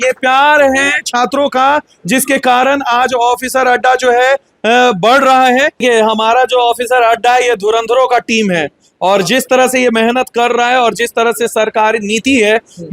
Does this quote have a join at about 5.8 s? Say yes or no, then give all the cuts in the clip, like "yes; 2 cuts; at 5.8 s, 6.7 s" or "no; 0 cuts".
yes; 1 cut; at 5.8 s